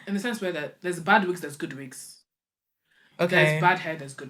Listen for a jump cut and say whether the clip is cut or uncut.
uncut